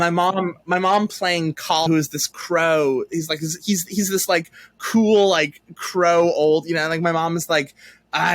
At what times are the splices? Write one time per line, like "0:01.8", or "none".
0:01.9